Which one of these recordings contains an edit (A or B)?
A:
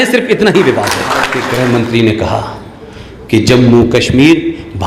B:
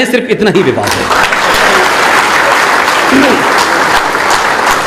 A